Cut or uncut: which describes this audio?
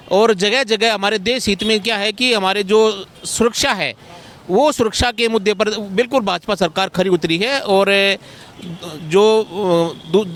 uncut